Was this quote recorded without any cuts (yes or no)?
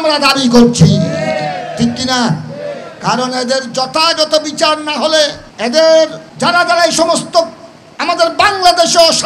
no